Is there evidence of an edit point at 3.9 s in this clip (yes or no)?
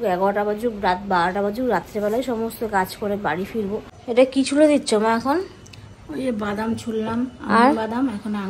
yes